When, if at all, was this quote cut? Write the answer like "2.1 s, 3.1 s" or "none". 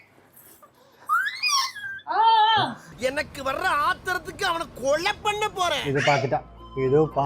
5.8 s